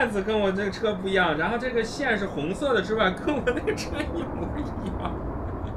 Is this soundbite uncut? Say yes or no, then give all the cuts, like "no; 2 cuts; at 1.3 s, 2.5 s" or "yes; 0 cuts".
yes; 0 cuts